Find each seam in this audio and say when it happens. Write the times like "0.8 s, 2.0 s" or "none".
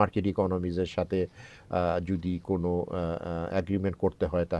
none